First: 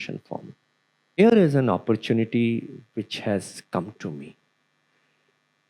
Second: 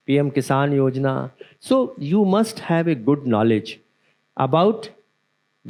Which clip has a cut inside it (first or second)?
first